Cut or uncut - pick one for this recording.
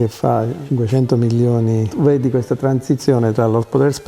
cut